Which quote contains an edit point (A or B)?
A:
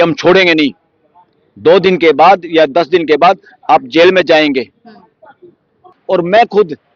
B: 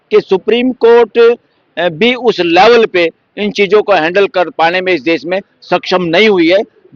A